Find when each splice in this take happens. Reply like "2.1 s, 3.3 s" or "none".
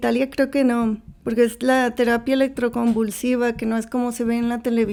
none